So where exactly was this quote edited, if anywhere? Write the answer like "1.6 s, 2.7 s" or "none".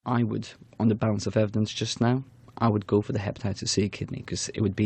1.0 s